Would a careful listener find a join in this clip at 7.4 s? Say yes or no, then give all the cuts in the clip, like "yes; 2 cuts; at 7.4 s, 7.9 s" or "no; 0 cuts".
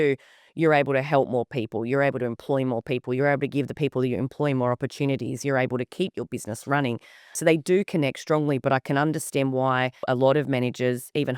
yes; 2 cuts; at 7.4 s, 10.0 s